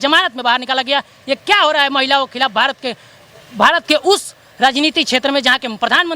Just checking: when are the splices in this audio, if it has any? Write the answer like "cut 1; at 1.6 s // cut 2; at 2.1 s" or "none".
none